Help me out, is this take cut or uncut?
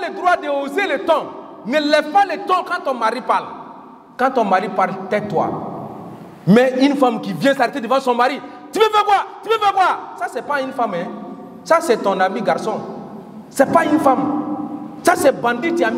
uncut